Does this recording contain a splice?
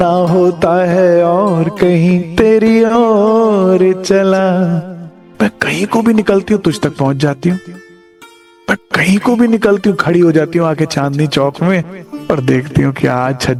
no; 0 cuts

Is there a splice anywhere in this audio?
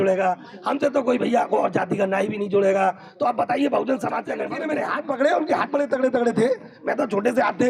yes; 1 cut; at 4.4 s

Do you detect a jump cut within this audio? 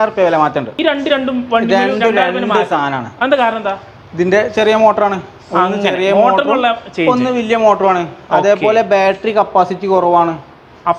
no; 0 cuts

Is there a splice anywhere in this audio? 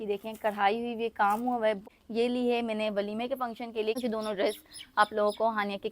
yes; 2 cuts; at 1.8 s, 4.0 s

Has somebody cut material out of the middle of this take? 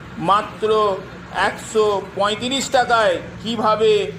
no; 0 cuts

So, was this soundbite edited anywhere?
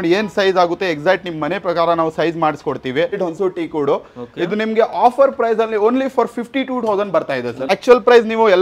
yes; 2 cuts; at 3.2 s, 7.7 s

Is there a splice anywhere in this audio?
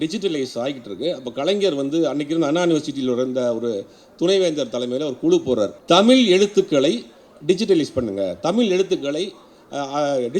yes; 1 cut; at 5.8 s

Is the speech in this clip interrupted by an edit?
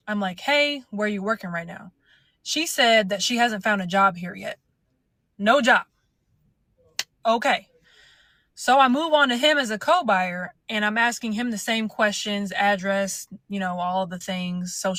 no; 0 cuts

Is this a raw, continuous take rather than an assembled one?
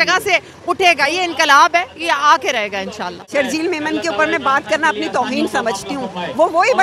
no; 1 cut; at 3.2 s

